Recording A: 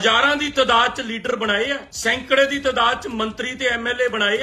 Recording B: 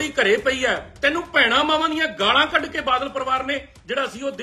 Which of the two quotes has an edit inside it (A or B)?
A